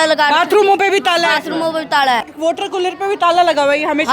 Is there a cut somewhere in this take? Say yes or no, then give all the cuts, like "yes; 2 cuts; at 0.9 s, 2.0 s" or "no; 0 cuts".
yes; 1 cut; at 2.3 s